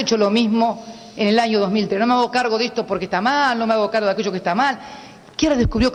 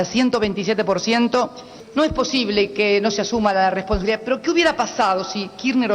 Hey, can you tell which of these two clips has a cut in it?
second; 1 cut; at 1.8 s

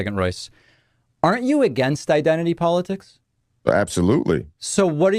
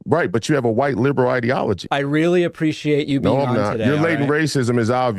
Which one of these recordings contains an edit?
second; 1 cut; at 1.8 s

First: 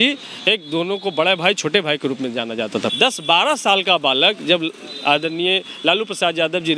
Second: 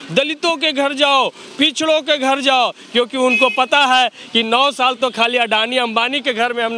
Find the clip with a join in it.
first; 1 cut; at 2.9 s

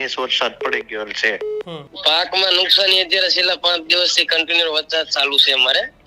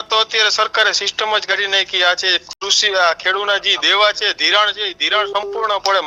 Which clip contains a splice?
first; 1 cut; at 1.8 s

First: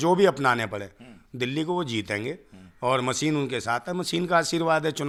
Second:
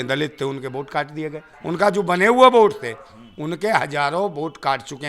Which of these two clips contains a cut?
second; 1 cut; at 1.5 s

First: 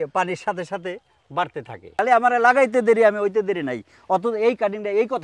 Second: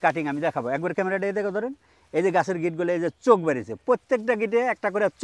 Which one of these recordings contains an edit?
first; 1 cut; at 2.0 s

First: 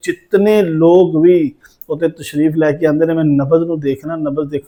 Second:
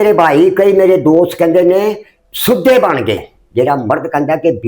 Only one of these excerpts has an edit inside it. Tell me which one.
second; 1 cut; at 3.4 s

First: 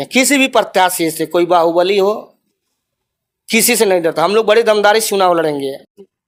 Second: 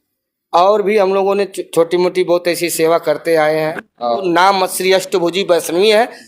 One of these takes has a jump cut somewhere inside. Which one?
second; 1 cut; at 4.2 s

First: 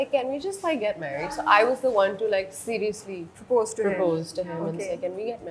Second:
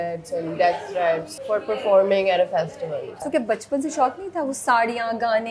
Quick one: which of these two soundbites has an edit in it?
second; 2 cuts; at 1.3 s, 3.2 s

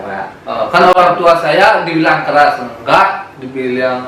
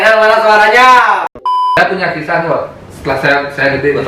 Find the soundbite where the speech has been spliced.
second; 1 cut; at 1.8 s

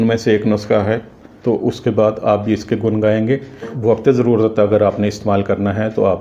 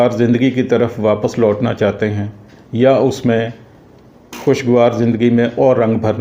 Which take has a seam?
first; 2 cuts; at 1.3 s, 3.7 s

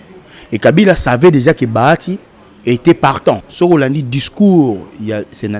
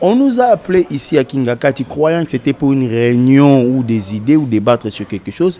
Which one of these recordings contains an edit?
first; 1 cut; at 3.5 s

